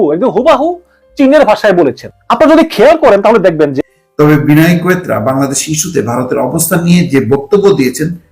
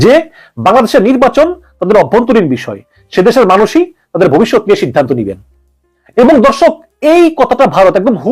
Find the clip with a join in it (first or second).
first